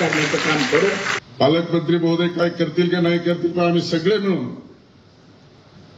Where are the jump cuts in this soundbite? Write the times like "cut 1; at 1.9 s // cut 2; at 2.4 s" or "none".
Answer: cut 1; at 1.2 s